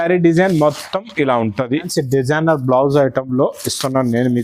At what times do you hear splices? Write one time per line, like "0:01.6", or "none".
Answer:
0:01.9